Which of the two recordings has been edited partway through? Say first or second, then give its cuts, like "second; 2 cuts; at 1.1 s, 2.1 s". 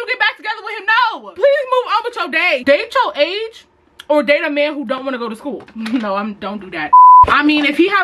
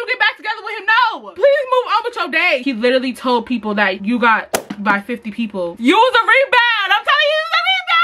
second; 2 cuts; at 2.6 s, 5.7 s